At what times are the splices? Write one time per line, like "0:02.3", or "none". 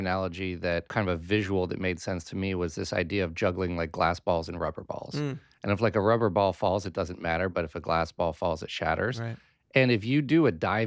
0:00.9